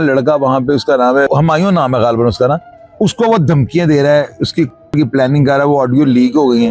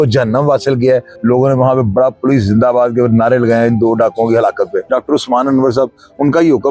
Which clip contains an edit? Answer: second; 2 cuts; at 1.1 s, 4.9 s

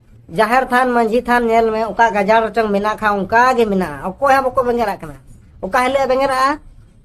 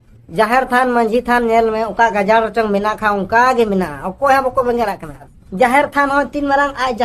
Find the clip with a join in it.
second; 1 cut; at 5.4 s

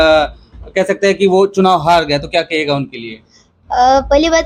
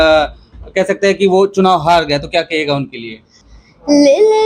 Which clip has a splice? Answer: second; 1 cut; at 3.5 s

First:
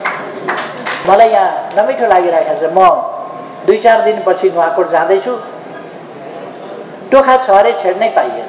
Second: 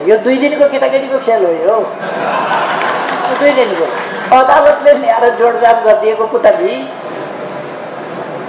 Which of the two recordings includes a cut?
first; 1 cut; at 1.0 s

